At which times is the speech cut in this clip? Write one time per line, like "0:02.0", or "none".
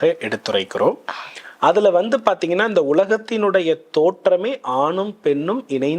none